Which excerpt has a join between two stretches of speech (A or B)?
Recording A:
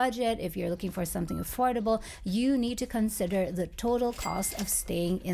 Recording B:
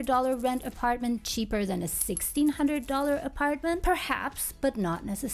B